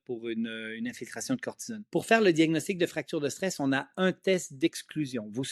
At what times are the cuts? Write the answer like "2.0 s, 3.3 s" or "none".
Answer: 1.9 s